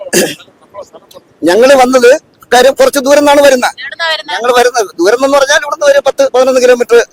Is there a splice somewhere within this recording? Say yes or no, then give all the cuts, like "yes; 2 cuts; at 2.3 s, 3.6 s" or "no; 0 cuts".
no; 0 cuts